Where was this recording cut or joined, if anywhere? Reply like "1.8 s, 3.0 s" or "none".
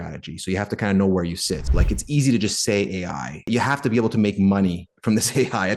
1.6 s, 3.5 s